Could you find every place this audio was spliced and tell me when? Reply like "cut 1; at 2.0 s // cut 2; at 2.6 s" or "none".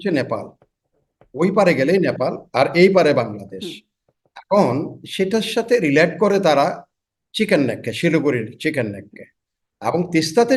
none